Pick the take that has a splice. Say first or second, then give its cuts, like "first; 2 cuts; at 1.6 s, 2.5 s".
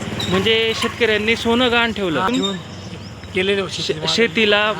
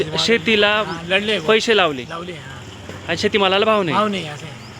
first; 1 cut; at 2.3 s